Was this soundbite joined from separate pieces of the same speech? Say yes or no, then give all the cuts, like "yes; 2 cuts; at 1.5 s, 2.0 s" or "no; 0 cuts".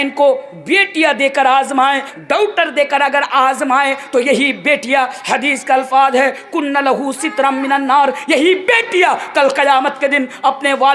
yes; 1 cut; at 2.1 s